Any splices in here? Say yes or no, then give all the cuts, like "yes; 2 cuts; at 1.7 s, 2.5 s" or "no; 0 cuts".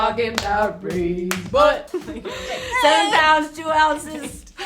yes; 1 cut; at 1.9 s